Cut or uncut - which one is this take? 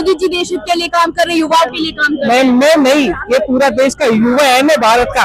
uncut